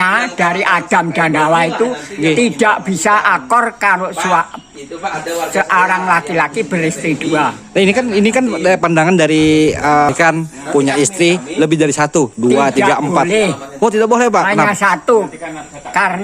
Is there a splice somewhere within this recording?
yes; 1 cut; at 10.1 s

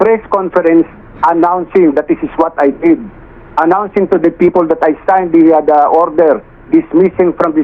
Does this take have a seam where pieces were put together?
no; 0 cuts

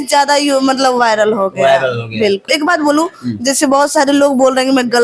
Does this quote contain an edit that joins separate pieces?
yes; 1 cut; at 2.5 s

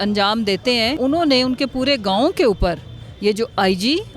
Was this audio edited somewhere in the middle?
yes; 1 cut; at 0.9 s

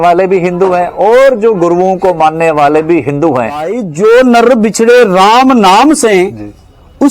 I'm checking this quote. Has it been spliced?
yes; 1 cut; at 3.8 s

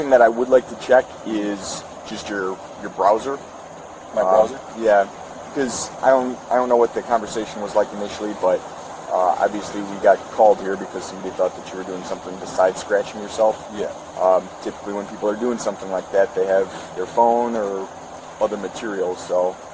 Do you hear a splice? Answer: no; 0 cuts

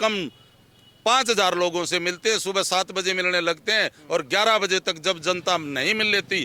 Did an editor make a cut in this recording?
no; 0 cuts

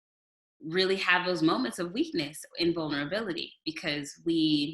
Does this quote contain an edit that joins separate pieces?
no; 0 cuts

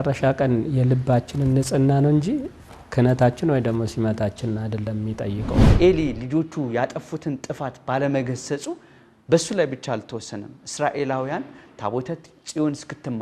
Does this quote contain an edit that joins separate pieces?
yes; 1 cut; at 5.7 s

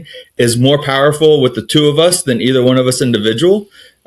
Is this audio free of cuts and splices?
yes; 0 cuts

